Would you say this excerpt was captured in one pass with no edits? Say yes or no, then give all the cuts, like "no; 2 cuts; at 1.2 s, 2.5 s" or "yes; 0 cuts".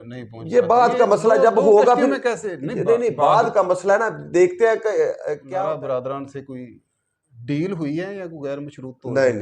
no; 1 cut; at 5.4 s